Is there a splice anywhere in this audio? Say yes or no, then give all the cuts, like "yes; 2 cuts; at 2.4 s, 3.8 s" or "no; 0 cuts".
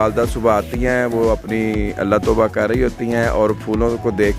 no; 0 cuts